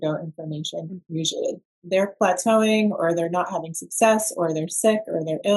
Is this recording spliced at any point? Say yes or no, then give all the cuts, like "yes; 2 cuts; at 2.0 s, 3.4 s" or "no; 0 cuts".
yes; 1 cut; at 1.8 s